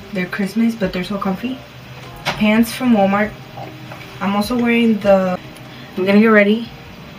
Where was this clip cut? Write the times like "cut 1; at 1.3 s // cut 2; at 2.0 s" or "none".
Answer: cut 1; at 5.5 s